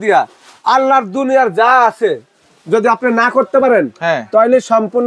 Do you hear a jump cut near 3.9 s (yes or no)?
no